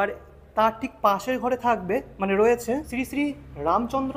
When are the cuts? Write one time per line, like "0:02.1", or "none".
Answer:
0:02.9

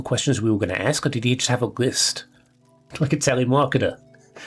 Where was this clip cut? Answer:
0:02.8

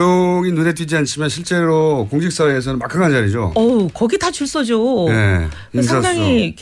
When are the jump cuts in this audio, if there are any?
none

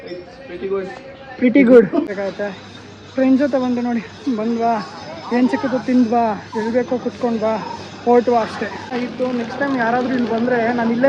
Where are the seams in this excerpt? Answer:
0:02.1
0:08.9

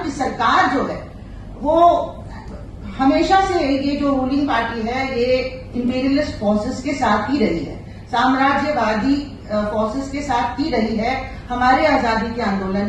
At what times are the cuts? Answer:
none

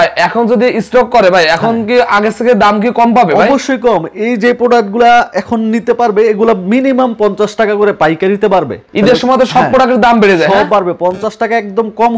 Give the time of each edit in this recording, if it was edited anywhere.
none

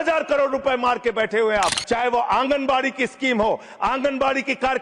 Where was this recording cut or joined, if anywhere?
0:01.8

